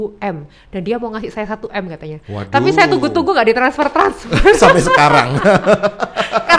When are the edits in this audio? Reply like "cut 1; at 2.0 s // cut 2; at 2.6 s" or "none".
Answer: none